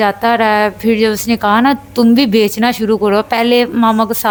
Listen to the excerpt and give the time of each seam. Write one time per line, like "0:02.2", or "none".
none